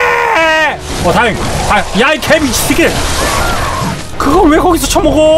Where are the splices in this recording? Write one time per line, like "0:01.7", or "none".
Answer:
0:04.1